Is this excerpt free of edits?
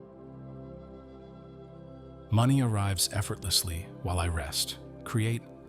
no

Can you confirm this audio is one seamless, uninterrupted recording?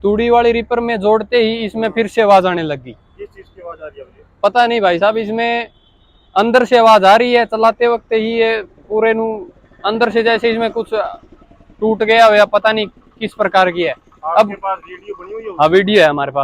yes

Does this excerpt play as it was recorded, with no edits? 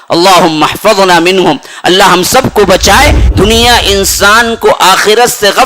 no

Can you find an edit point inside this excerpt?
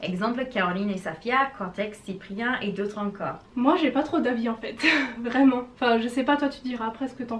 no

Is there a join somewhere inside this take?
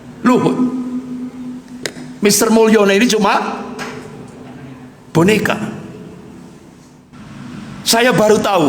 yes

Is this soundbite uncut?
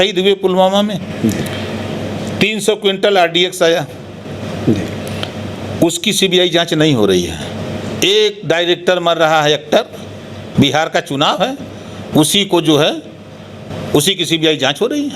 yes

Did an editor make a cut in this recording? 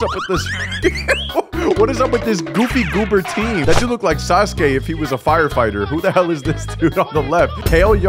no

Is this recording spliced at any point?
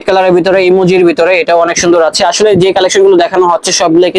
no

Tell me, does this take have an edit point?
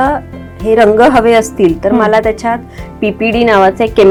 no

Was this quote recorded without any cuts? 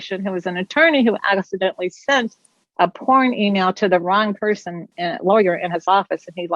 no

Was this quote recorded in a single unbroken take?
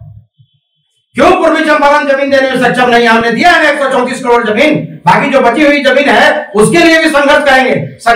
yes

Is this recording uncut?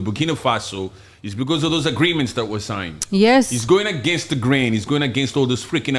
yes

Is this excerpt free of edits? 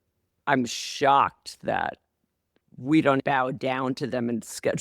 no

